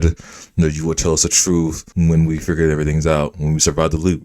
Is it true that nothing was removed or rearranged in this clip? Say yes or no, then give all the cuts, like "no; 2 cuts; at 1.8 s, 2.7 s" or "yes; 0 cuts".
no; 1 cut; at 1.8 s